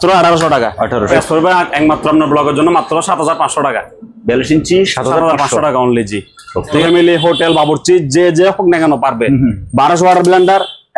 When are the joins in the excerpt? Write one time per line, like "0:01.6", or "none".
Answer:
0:01.1
0:06.7